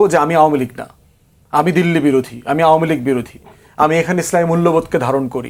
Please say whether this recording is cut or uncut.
uncut